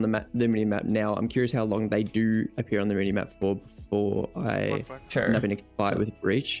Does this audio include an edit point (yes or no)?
no